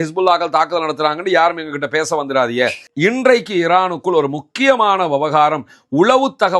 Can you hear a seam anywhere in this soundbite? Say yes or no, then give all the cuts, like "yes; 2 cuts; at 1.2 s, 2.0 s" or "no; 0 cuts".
yes; 1 cut; at 2.8 s